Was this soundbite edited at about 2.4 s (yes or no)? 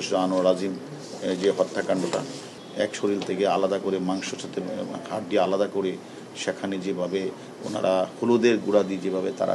yes